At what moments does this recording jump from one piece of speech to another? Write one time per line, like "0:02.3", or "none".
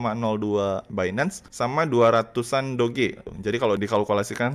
0:01.0
0:03.3